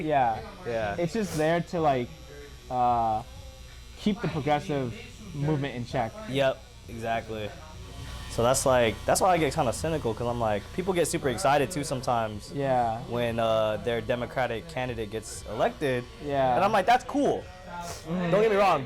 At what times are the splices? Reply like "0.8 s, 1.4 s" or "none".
none